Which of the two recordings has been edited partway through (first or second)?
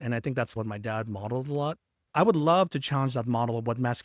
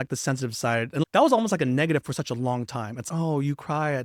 first